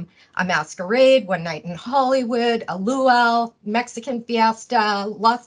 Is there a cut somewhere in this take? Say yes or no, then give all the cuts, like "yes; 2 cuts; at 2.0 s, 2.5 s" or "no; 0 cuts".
no; 0 cuts